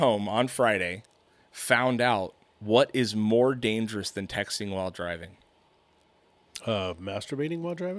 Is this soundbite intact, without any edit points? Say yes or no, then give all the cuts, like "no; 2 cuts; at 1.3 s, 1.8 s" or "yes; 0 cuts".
yes; 0 cuts